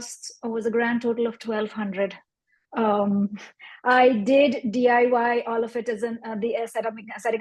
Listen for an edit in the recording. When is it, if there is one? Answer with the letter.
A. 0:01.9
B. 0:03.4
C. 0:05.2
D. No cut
D